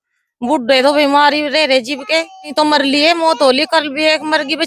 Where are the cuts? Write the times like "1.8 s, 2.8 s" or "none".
2.5 s